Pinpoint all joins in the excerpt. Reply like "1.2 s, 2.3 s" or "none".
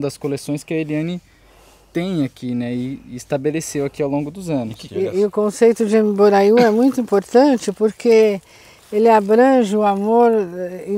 4.8 s